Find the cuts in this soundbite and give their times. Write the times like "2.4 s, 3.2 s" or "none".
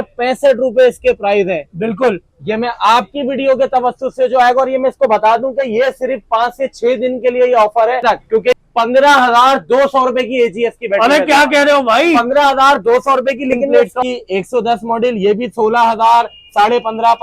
8.6 s, 13.6 s